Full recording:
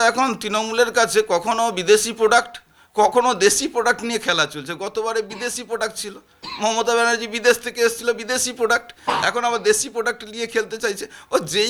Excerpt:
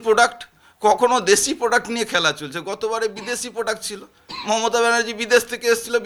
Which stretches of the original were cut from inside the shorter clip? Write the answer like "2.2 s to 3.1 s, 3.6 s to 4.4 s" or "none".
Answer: none